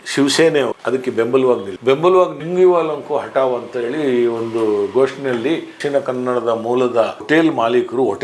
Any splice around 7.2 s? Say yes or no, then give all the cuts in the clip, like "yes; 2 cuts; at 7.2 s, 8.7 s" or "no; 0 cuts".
yes; 2 cuts; at 5.8 s, 7.2 s